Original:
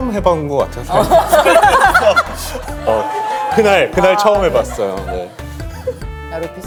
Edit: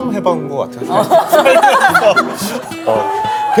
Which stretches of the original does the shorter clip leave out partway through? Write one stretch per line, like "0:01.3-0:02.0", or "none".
none